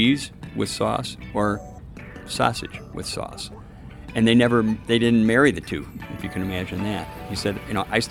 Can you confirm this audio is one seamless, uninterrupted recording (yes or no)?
no